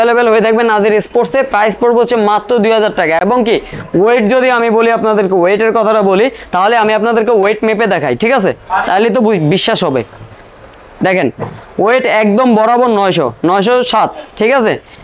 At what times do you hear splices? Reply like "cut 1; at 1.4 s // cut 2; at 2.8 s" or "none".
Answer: none